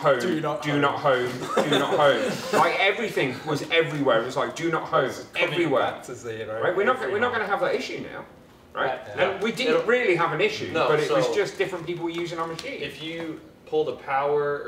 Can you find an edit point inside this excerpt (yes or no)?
no